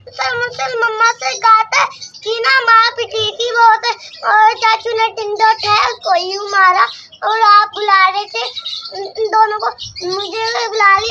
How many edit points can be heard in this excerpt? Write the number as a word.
one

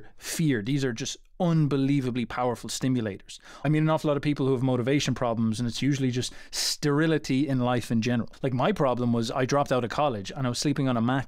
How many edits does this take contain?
two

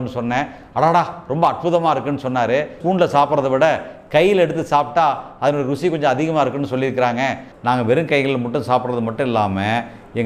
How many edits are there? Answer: two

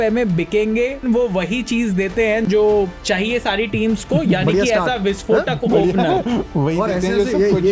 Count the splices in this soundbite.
two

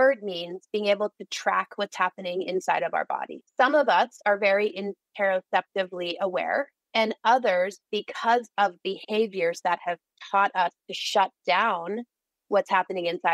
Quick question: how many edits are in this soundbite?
one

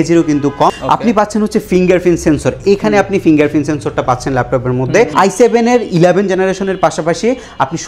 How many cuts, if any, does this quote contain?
two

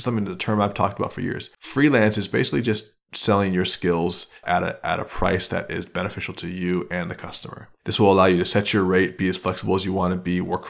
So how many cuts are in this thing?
two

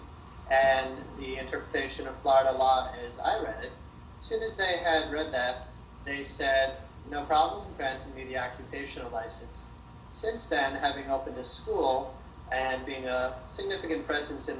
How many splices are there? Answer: zero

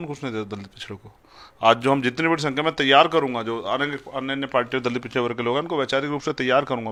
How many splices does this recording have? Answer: zero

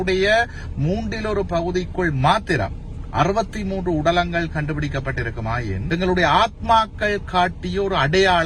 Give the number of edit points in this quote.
one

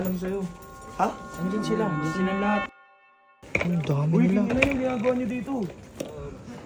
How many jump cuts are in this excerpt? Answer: one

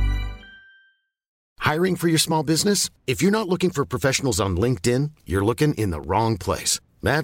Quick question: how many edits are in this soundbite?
one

